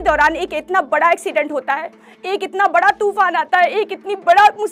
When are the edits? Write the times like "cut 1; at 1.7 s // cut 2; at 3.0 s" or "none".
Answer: none